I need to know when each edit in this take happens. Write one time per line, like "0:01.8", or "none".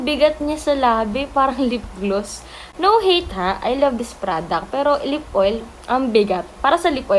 none